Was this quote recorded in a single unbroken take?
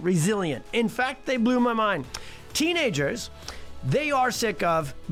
yes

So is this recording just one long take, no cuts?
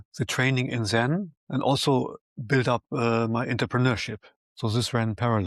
yes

